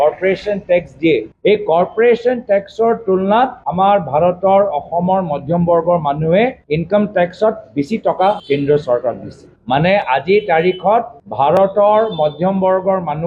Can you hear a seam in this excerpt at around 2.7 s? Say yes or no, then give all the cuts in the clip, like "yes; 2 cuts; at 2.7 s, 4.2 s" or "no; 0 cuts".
no; 0 cuts